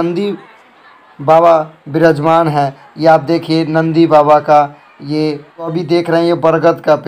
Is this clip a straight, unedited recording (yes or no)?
no